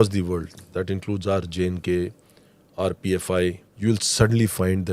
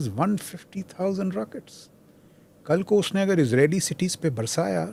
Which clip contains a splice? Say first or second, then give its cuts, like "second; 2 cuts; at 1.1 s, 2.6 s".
first; 1 cut; at 3.7 s